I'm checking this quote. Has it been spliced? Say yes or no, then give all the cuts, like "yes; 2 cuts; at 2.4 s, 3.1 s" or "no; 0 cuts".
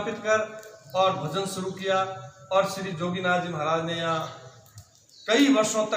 no; 0 cuts